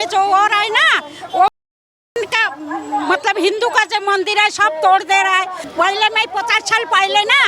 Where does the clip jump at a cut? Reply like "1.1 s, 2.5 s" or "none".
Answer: 5.6 s